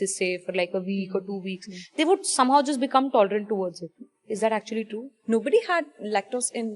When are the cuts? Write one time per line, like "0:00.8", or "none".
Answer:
0:04.2
0:05.1